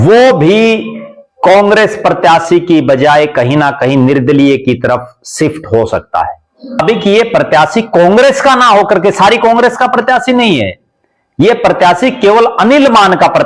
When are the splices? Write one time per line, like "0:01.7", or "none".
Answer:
0:06.8